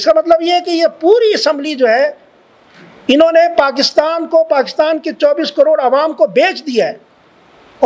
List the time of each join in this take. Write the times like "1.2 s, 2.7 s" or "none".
none

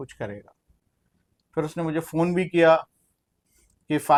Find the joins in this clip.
none

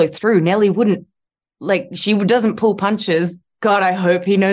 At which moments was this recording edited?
3.4 s

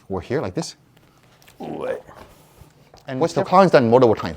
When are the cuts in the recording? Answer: 3.3 s

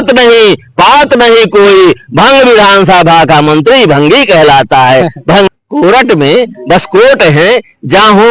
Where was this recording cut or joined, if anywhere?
5.5 s

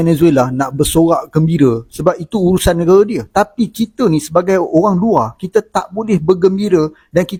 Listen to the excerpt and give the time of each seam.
none

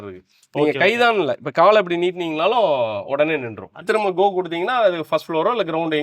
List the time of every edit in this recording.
3.8 s

